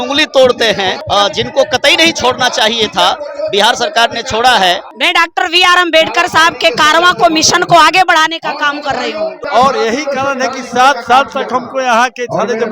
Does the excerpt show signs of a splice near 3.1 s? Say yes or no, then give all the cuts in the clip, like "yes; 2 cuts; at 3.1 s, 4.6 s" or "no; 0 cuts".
no; 3 cuts; at 1.0 s, 4.9 s, 9.4 s